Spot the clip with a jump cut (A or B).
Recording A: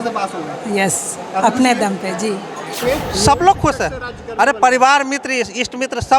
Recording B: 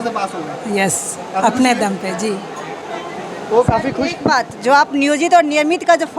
A